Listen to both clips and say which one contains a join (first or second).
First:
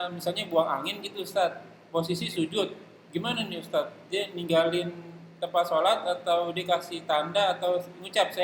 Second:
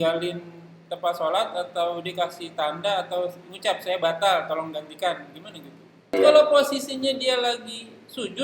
second